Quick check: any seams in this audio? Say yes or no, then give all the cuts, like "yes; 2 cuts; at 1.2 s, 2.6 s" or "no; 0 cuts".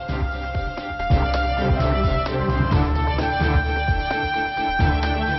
yes; 1 cut; at 0.9 s